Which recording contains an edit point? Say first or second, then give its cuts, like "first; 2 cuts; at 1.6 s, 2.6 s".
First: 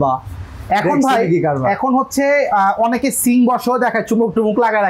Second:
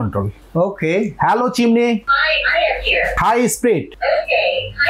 second; 3 cuts; at 2.1 s, 3.2 s, 3.9 s